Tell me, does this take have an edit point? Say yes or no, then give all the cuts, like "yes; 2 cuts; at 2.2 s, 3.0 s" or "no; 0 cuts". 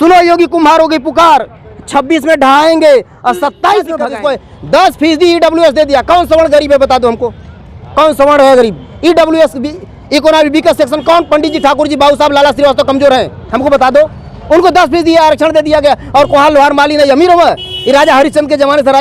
yes; 1 cut; at 4.0 s